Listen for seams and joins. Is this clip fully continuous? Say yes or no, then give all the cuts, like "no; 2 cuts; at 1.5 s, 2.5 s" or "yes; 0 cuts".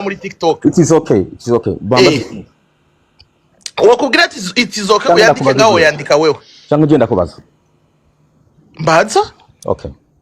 yes; 0 cuts